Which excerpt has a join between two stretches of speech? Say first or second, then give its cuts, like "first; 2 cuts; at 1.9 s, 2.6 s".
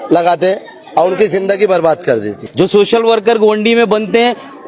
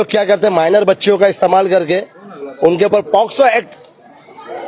first; 1 cut; at 2.4 s